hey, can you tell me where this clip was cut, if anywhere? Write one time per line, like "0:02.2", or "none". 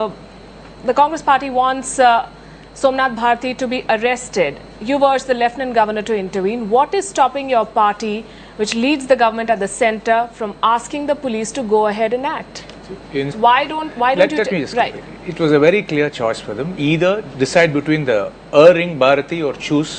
none